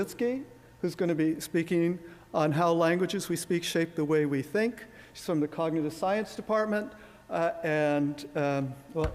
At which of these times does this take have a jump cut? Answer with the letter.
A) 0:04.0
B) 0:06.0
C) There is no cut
C